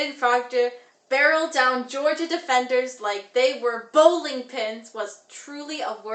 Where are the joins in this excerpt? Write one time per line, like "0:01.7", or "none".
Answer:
none